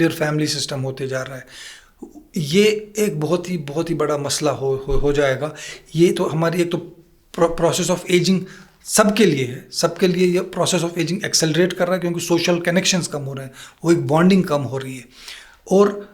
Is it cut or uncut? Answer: uncut